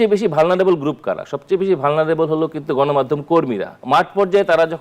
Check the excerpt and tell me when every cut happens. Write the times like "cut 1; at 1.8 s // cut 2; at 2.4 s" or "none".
cut 1; at 3.7 s

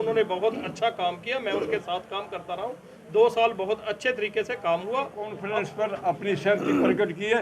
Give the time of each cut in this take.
cut 1; at 5.4 s

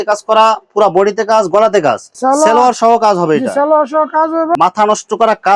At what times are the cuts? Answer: cut 1; at 2.1 s // cut 2; at 4.5 s

